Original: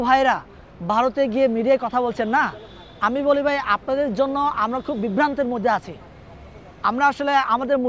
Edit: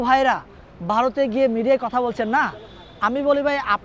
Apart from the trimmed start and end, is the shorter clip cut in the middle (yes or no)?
no